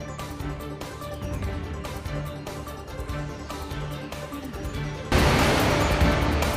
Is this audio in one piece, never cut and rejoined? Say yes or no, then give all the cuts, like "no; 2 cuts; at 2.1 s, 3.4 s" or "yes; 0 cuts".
no; 1 cut; at 5.1 s